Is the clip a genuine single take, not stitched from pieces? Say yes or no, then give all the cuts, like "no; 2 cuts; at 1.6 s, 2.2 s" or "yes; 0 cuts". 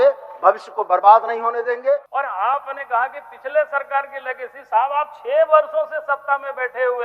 no; 1 cut; at 2.1 s